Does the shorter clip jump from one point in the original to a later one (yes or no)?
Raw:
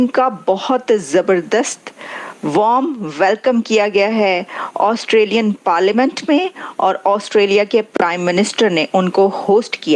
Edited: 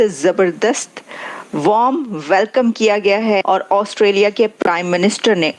yes